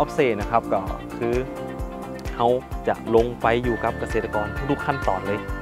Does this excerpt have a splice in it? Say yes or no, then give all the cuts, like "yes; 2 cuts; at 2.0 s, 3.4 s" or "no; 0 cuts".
no; 0 cuts